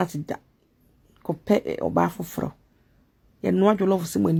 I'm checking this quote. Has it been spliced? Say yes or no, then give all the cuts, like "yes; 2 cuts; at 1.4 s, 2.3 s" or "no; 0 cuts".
no; 0 cuts